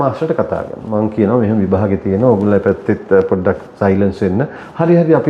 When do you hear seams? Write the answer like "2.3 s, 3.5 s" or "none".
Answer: none